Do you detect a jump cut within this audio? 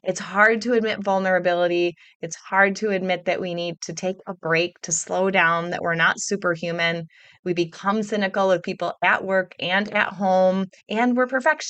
yes; 1 cut; at 10.8 s

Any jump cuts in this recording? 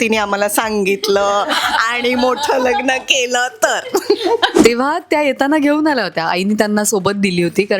yes; 1 cut; at 4.5 s

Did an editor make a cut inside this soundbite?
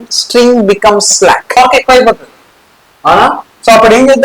yes; 1 cut; at 1.6 s

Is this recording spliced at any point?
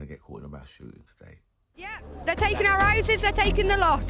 yes; 1 cut; at 2.1 s

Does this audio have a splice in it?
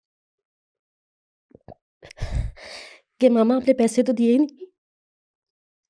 no; 0 cuts

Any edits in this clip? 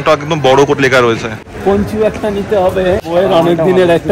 yes; 2 cuts; at 1.4 s, 3.0 s

